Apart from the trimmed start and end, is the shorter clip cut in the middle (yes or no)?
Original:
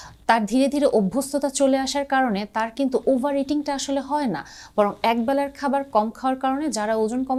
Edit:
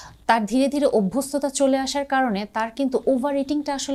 no